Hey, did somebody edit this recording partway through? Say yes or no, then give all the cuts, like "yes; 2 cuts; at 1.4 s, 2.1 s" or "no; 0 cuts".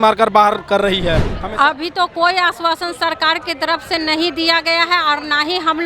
yes; 1 cut; at 1.3 s